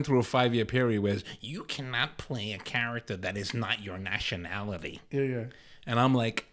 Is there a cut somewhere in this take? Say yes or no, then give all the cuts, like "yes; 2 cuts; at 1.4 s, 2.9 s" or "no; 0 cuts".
no; 0 cuts